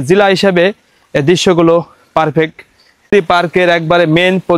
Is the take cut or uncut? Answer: cut